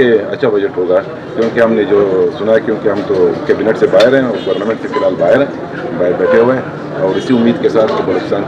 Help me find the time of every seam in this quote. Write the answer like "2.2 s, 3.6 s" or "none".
none